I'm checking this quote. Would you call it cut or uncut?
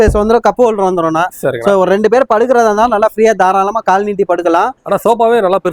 uncut